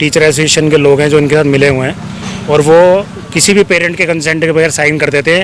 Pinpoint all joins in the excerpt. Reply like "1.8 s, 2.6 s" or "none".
none